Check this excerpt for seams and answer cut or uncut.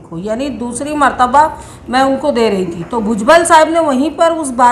uncut